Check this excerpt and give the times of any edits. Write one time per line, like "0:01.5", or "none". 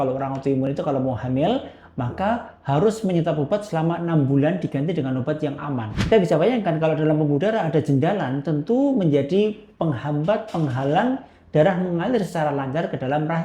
0:05.9